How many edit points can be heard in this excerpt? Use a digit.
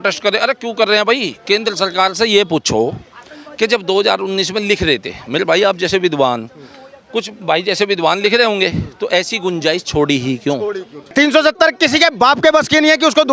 1